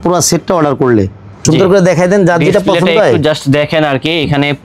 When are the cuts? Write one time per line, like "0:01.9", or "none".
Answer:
0:01.3

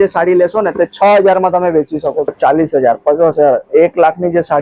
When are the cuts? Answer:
0:02.3

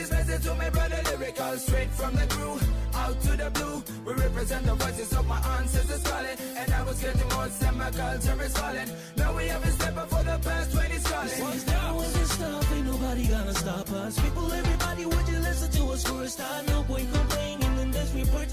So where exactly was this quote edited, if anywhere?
0:11.5

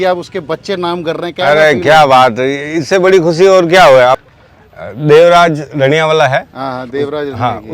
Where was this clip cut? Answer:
0:04.2

